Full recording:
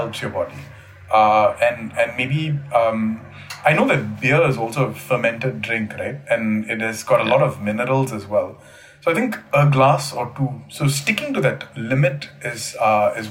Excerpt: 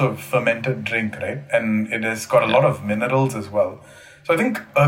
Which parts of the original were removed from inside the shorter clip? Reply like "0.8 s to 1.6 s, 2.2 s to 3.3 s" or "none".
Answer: none